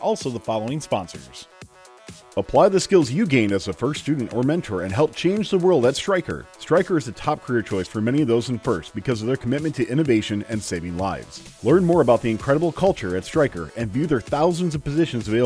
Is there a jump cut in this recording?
yes; 1 cut; at 1.8 s

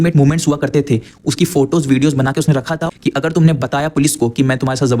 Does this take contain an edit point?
yes; 1 cut; at 2.9 s

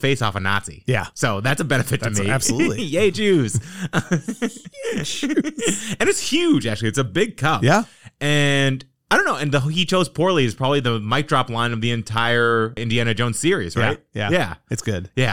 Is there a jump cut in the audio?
yes; 1 cut; at 12.8 s

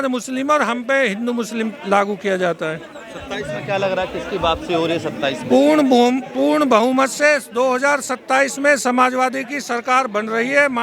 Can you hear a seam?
no; 0 cuts

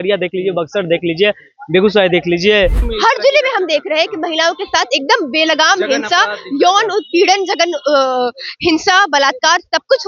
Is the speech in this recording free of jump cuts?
no; 1 cut; at 2.8 s

